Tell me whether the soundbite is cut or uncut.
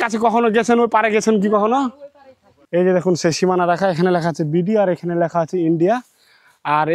cut